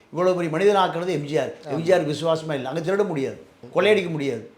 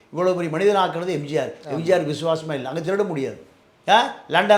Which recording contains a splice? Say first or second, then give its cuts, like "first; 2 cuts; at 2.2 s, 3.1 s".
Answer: second; 1 cut; at 3.5 s